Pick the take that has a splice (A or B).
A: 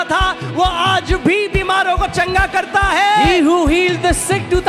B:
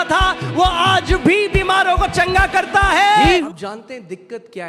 B